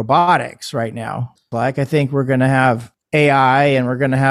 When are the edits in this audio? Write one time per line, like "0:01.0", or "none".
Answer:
0:01.4
0:03.0